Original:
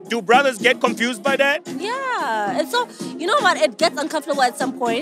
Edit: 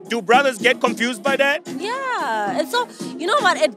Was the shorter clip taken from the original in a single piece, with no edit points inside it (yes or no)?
yes